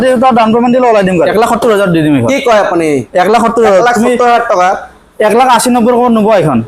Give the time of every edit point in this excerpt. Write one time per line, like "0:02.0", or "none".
0:01.3